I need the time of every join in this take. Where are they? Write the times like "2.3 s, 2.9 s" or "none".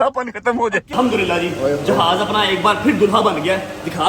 0.9 s